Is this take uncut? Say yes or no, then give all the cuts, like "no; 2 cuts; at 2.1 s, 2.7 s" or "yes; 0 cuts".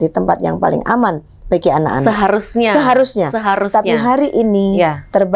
yes; 0 cuts